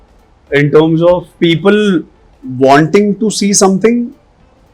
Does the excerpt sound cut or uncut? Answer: cut